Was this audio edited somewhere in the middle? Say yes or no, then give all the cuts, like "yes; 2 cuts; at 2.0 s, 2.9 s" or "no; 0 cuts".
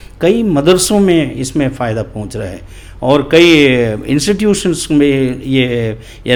no; 0 cuts